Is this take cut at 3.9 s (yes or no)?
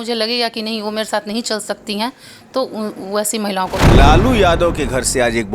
yes